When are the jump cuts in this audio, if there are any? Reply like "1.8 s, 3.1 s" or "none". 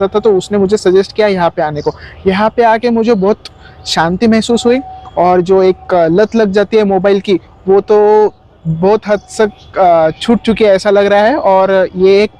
none